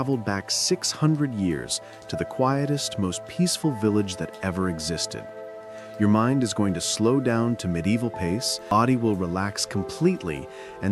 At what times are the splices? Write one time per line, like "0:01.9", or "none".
0:08.7